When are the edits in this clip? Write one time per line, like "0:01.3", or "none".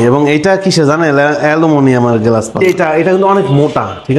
0:02.6